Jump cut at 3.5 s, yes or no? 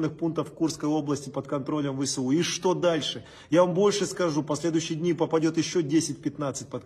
no